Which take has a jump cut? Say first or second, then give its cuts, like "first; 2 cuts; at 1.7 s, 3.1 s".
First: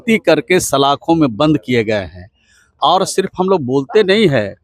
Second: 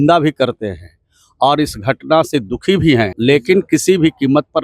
second; 1 cut; at 3.1 s